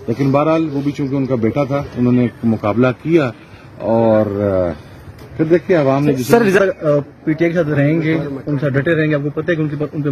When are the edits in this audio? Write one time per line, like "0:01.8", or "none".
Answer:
0:06.6